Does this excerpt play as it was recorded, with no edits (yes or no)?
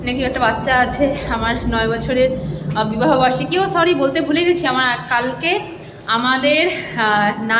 yes